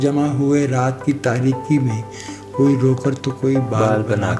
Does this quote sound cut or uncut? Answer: uncut